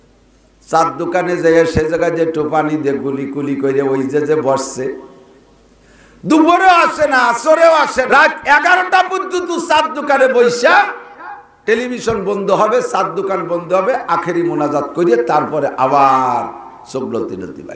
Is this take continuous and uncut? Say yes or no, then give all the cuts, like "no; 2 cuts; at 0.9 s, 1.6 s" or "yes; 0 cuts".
no; 1 cut; at 8.1 s